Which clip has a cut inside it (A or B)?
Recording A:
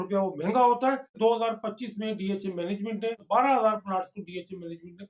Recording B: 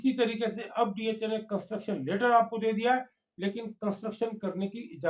A